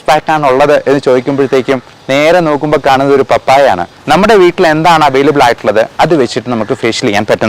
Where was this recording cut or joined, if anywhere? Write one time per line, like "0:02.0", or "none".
0:03.9